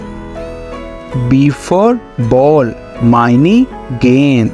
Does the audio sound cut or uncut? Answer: uncut